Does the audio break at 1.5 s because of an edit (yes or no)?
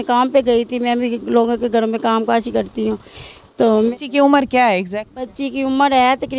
no